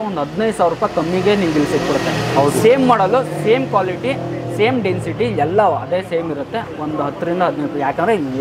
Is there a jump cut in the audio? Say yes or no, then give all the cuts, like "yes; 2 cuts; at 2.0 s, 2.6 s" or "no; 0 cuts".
no; 0 cuts